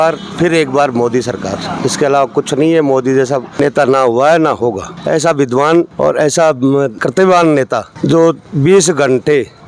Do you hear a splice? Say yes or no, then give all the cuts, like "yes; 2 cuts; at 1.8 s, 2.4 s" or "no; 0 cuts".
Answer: yes; 5 cuts; at 1.8 s, 3.6 s, 4.9 s, 5.9 s, 7.0 s